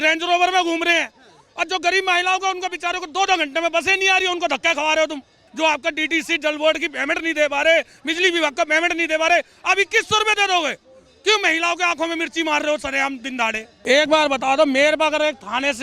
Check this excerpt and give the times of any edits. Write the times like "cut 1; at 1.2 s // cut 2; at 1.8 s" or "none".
cut 1; at 5.4 s // cut 2; at 13.7 s